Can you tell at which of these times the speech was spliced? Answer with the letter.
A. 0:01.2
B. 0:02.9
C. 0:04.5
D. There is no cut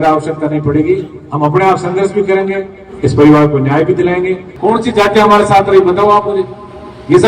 C